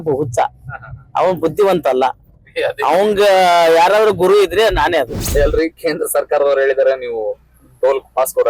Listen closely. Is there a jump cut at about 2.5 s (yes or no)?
no